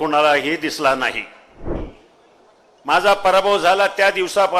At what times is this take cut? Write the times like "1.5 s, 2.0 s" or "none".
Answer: 1.8 s